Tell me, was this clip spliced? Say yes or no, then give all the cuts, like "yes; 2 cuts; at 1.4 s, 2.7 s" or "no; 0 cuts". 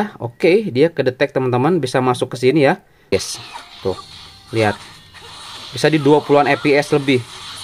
yes; 1 cut; at 3.1 s